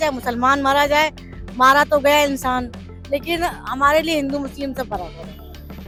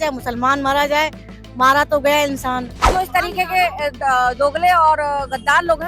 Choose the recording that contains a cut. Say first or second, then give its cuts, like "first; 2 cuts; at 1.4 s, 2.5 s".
second; 1 cut; at 2.8 s